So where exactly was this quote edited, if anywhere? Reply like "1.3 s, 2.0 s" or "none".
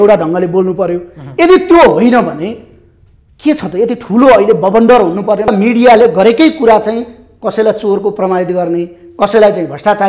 5.5 s